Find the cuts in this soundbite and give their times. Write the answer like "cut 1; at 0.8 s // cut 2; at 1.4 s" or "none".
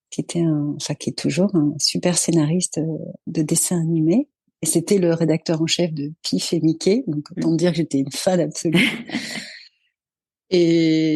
none